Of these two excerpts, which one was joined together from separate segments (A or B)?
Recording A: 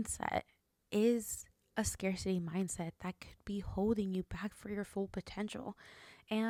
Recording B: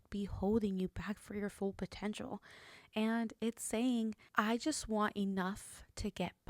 B